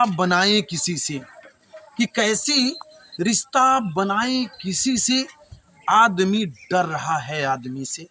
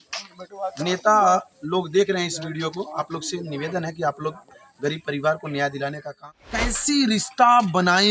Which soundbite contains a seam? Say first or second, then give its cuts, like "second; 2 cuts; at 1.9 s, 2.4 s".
second; 1 cut; at 6.1 s